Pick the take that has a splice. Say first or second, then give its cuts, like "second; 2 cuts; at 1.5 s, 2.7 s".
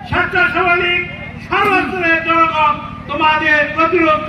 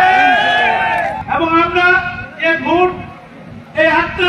second; 1 cut; at 1.2 s